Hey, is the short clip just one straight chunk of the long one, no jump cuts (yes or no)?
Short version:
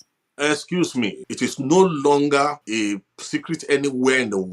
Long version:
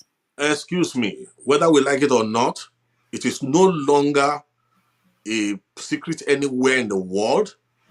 no